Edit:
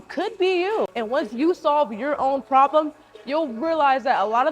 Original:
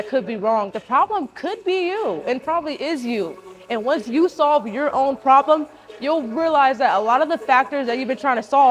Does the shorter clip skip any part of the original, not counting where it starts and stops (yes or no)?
yes